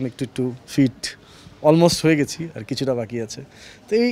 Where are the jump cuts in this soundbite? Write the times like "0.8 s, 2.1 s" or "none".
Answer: none